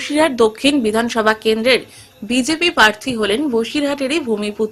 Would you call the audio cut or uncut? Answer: uncut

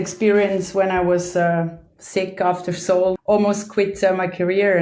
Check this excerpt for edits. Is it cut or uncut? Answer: cut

